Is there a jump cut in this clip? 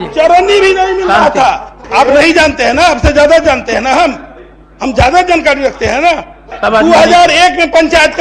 yes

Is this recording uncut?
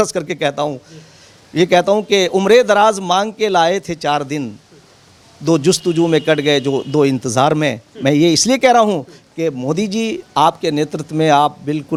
yes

